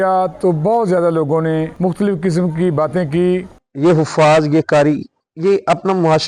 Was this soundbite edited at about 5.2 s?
no; 2 cuts; at 1.7 s, 3.6 s

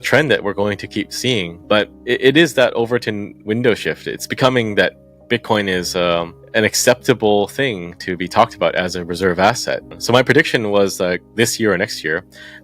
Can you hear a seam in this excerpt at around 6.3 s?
no; 2 cuts; at 2.0 s, 9.9 s

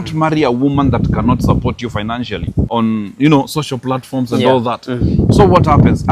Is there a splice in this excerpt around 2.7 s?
yes; 1 cut; at 2.7 s

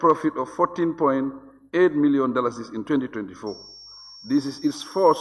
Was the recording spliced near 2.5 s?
no; 0 cuts

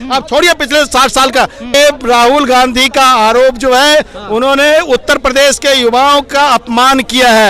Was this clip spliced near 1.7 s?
yes; 1 cut; at 1.7 s

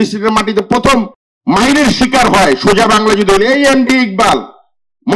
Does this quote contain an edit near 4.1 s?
no; 1 cut; at 1.2 s

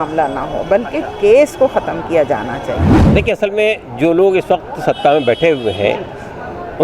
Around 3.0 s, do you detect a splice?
yes; 1 cut; at 3.0 s

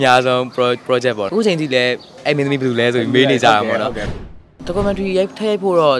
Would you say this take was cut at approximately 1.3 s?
yes; 2 cuts; at 1.3 s, 4.2 s

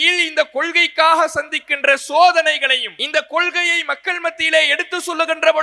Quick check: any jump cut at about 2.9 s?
yes; 1 cut; at 2.9 s

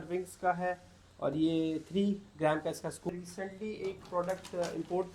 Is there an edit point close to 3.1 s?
yes; 1 cut; at 3.1 s

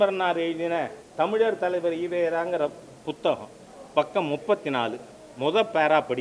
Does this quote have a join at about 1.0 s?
yes; 1 cut; at 1.0 s

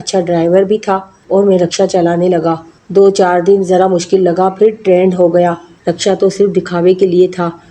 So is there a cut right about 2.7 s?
no; 2 cuts; at 1.2 s, 5.7 s

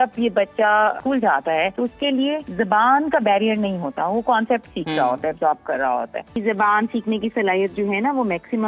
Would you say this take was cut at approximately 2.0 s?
yes; 3 cuts; at 1.0 s, 2.0 s, 6.4 s

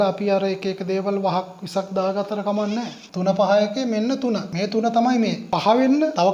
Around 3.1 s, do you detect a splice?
yes; 1 cut; at 3.1 s

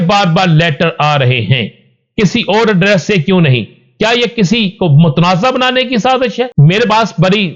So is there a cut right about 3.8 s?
no; 1 cut; at 6.5 s

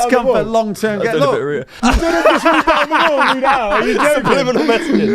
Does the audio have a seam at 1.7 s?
yes; 1 cut; at 1.7 s

